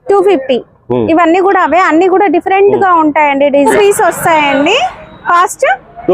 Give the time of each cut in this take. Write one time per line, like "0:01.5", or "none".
0:03.7